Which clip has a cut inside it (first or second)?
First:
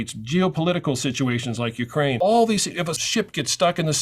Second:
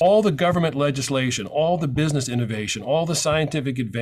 first